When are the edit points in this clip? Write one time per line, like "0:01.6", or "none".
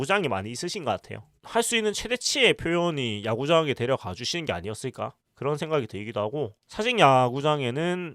0:01.3
0:06.5